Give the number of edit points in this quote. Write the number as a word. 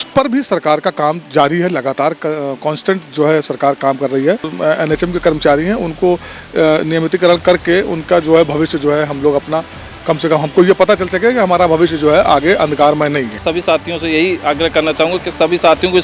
two